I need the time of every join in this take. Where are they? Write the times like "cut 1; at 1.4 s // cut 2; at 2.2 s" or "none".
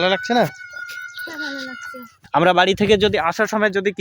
cut 1; at 2.2 s